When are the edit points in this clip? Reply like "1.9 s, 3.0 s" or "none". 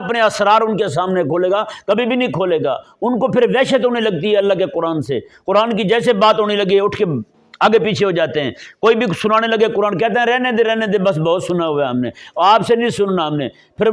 none

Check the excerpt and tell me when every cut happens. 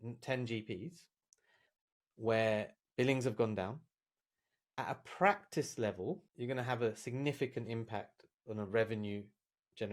6.3 s

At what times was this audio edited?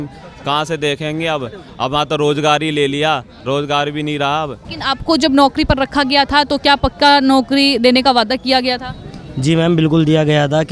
4.7 s

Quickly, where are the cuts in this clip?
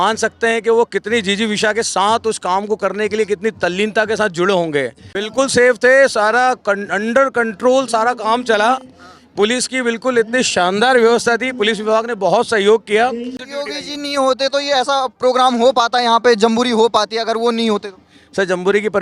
5.0 s, 13.5 s

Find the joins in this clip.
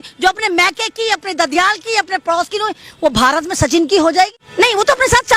4.4 s

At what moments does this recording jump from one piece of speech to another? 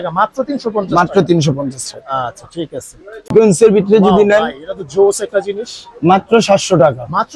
3.3 s

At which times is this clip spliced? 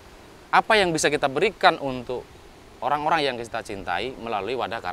none

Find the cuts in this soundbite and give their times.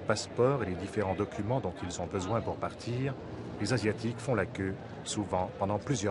2.9 s

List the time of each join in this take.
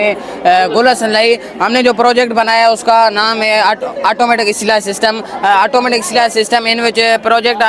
none

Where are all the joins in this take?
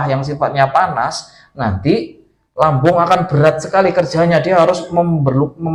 none

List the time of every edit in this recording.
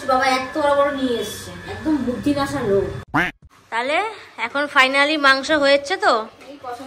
3.0 s

